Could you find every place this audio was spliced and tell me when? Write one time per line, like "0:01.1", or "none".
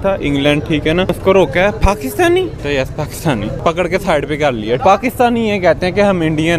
0:01.1
0:02.6
0:03.6
0:04.8